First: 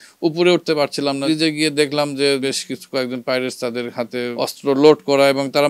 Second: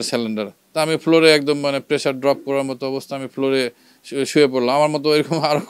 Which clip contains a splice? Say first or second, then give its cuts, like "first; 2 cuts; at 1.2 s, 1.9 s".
first; 3 cuts; at 1.2 s, 2.4 s, 4.3 s